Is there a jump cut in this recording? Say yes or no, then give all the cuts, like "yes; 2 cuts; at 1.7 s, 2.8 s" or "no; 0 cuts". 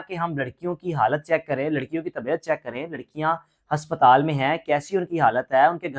no; 0 cuts